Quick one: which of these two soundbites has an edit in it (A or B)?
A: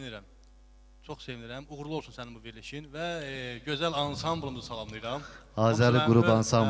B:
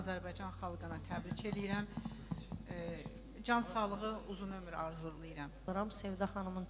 B